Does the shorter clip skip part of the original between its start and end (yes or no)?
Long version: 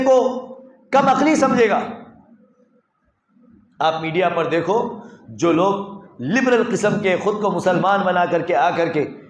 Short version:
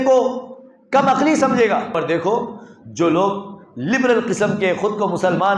yes